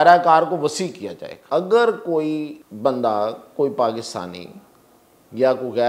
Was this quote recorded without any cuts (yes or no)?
no